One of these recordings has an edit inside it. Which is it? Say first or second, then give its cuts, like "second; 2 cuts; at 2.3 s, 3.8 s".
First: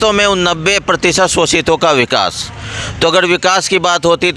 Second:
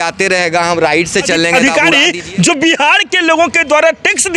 second; 1 cut; at 1.5 s